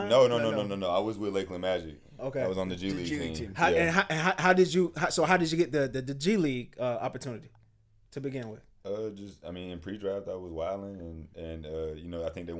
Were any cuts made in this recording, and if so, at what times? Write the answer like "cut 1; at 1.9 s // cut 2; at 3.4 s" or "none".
none

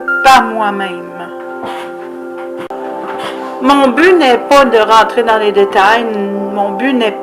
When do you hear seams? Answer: cut 1; at 5.1 s

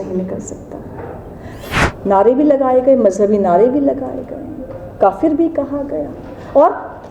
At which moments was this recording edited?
cut 1; at 1.6 s

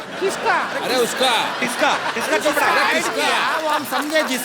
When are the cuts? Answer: none

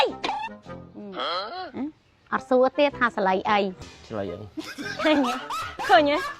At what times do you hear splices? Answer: cut 1; at 3.8 s

